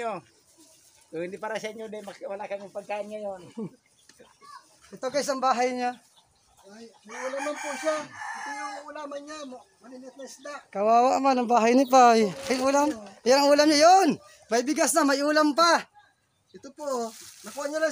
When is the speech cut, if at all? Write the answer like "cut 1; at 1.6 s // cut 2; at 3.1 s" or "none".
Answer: none